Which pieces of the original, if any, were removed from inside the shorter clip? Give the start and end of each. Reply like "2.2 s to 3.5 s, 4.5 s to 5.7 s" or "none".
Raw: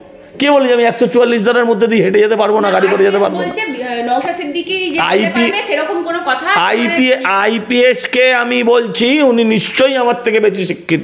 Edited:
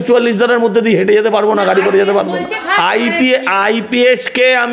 3.7 s to 6.4 s